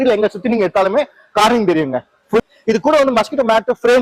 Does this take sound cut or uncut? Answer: cut